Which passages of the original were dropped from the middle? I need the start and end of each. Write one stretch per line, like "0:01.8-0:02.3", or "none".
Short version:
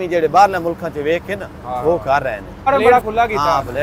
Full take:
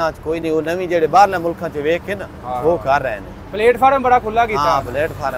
0:03.7-0:04.1